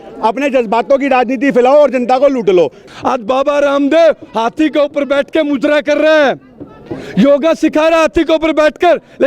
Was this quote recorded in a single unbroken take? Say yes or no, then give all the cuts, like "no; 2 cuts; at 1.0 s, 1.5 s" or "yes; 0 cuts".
no; 1 cut; at 2.8 s